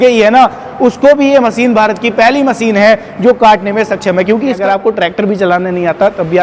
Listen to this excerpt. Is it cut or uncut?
cut